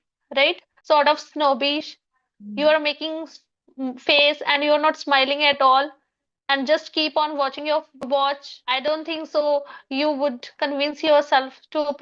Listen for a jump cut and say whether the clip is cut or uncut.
uncut